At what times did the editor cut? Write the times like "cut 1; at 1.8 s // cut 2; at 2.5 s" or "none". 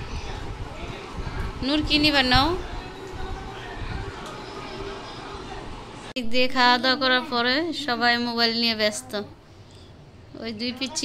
cut 1; at 6.1 s

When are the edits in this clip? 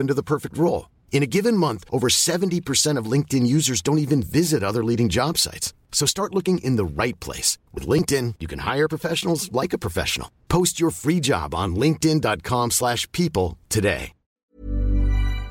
cut 1; at 14.4 s

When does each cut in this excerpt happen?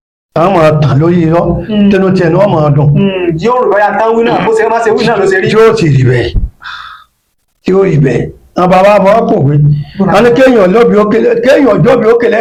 none

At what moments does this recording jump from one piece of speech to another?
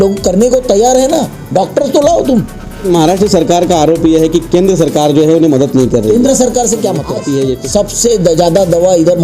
cut 1; at 2.8 s // cut 2; at 7.1 s

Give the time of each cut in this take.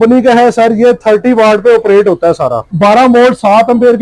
cut 1; at 2.7 s

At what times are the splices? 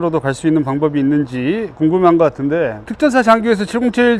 none

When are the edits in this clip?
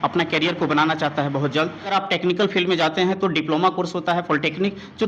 cut 1; at 1.9 s

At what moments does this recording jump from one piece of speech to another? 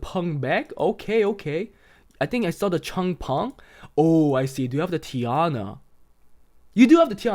none

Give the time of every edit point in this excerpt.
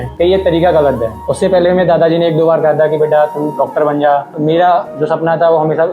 none

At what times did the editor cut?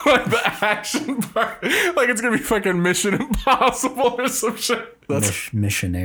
cut 1; at 5.0 s

